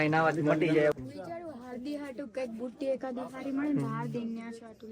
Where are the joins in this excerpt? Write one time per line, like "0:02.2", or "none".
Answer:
0:01.0